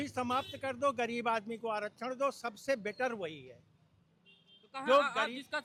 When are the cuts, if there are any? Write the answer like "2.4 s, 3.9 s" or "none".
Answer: none